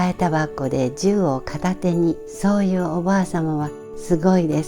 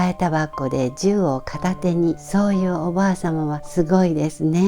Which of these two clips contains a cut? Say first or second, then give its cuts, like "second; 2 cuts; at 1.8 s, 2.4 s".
second; 2 cuts; at 2.2 s, 3.6 s